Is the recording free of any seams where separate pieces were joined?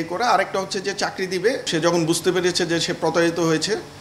no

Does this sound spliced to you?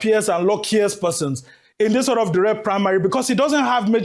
no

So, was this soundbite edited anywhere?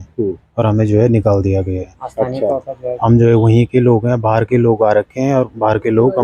no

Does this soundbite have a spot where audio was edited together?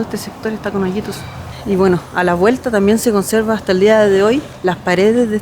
yes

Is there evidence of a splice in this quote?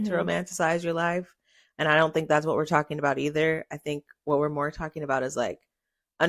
no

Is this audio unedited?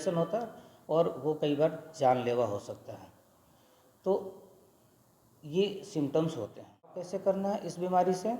no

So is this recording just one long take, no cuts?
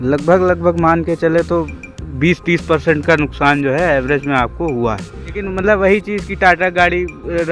no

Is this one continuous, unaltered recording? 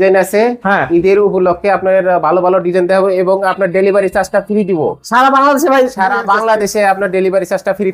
yes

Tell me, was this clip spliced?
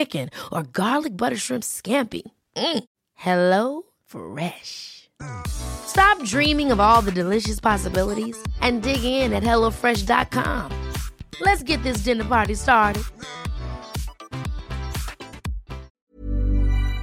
yes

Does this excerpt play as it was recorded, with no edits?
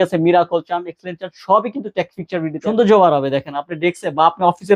no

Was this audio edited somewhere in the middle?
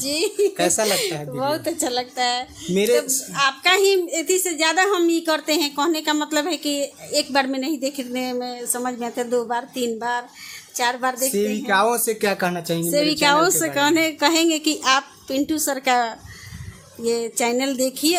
no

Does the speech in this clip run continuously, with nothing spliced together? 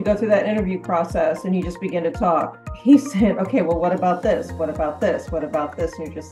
yes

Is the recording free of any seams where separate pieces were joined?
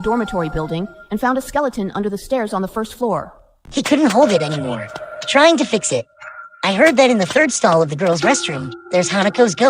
no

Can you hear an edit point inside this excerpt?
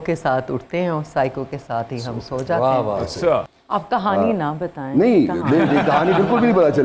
yes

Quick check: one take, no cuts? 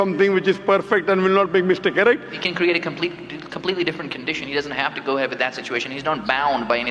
no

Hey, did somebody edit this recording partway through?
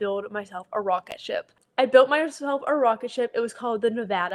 no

